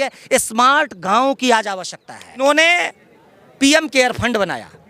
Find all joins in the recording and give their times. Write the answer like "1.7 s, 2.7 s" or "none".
2.4 s